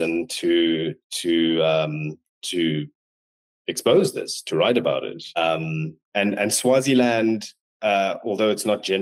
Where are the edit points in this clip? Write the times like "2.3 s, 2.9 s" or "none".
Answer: 5.2 s